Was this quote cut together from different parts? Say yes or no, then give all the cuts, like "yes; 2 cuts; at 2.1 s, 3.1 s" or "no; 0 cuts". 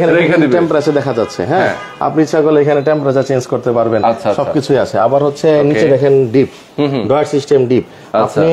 no; 0 cuts